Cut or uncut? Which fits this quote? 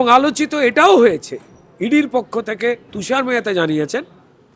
uncut